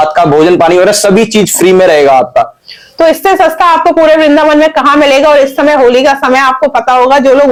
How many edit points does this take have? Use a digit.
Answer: 0